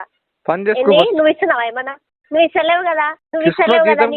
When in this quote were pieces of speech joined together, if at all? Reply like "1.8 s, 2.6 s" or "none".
3.2 s